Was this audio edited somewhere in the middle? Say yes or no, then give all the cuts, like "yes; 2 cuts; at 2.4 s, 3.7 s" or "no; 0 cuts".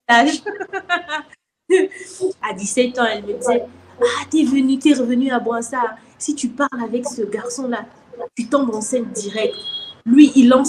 yes; 1 cut; at 2.4 s